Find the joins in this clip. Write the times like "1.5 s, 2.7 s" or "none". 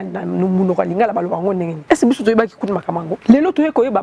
1.7 s, 3.1 s